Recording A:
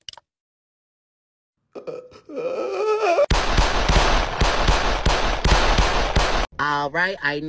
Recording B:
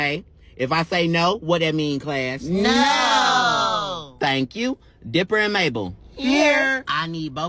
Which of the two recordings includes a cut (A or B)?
A